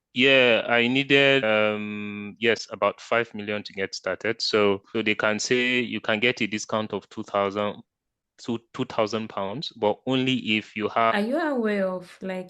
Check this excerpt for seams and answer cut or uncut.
cut